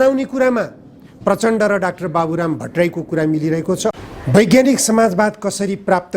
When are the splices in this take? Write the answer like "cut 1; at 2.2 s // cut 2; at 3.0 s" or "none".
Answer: cut 1; at 4.0 s